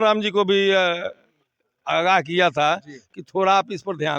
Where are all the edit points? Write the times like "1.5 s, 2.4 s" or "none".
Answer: none